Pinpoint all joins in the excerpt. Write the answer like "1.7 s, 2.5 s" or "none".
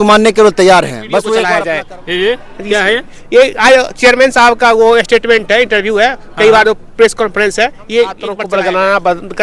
1.4 s, 8.3 s